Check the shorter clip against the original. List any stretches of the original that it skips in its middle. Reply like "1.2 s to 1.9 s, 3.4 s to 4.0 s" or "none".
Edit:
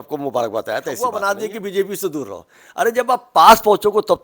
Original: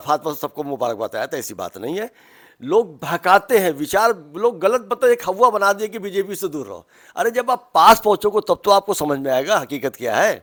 1.6 s to 5.5 s